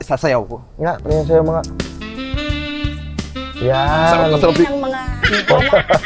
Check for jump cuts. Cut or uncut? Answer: uncut